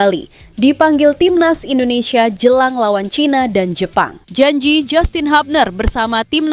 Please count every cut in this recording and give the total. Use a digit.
1